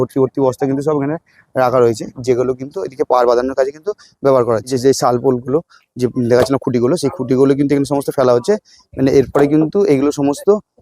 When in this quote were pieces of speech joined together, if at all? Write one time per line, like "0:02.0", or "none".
0:04.7